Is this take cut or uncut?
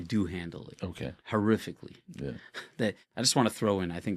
cut